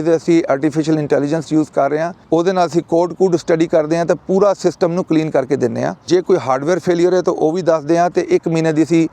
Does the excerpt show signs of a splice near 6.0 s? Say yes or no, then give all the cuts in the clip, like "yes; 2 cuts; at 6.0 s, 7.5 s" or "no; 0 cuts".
yes; 2 cuts; at 2.2 s, 6.0 s